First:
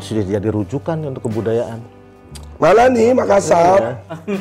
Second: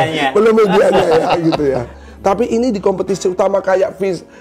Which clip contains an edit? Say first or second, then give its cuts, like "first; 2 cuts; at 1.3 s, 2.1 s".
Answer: second; 1 cut; at 1.9 s